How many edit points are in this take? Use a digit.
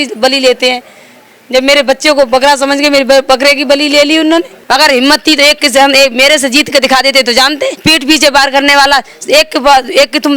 2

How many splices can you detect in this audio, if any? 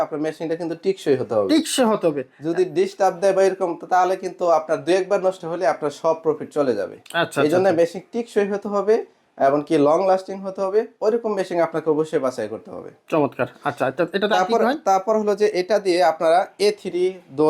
0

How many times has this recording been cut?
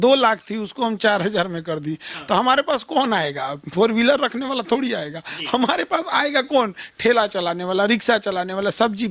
0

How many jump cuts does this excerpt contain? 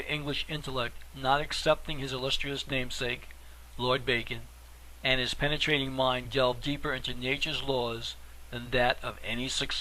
1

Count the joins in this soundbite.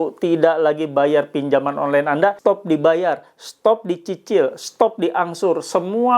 1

